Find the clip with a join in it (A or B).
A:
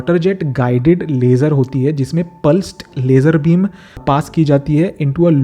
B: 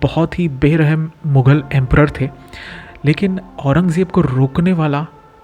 A